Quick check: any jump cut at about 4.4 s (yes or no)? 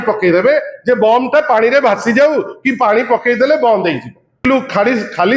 yes